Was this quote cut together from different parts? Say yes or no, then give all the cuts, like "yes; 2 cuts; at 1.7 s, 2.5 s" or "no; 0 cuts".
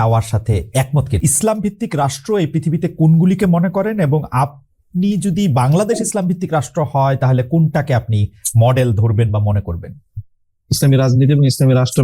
yes; 1 cut; at 1.1 s